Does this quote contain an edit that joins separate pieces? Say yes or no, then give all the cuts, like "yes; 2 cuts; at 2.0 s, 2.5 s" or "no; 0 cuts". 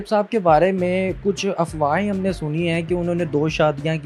no; 0 cuts